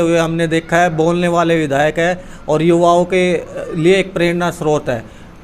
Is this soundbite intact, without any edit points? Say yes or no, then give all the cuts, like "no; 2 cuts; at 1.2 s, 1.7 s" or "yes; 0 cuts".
yes; 0 cuts